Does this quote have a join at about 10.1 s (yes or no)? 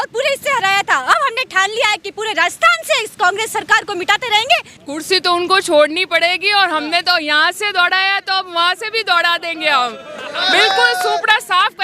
no